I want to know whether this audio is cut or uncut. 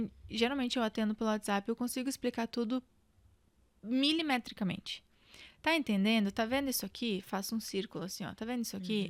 uncut